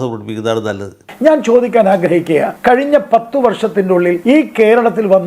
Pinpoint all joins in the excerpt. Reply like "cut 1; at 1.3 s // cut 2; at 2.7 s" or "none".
cut 1; at 1.1 s // cut 2; at 2.5 s // cut 3; at 4.2 s